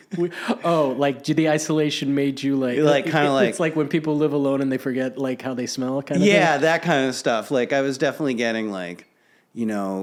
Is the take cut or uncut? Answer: uncut